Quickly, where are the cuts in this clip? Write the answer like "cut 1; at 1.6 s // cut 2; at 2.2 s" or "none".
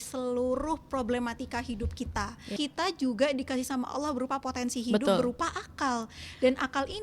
cut 1; at 2.5 s